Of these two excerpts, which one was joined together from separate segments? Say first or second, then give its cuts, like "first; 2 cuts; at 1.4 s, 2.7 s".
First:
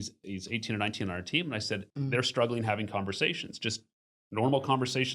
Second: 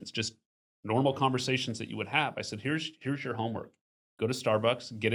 first; 1 cut; at 1.9 s